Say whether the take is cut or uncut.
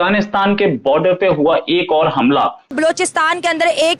cut